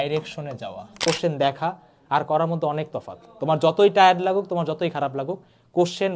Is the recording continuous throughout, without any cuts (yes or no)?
no